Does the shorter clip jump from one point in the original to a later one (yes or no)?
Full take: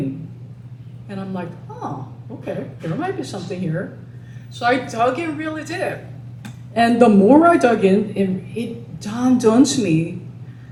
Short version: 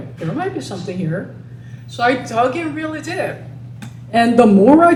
no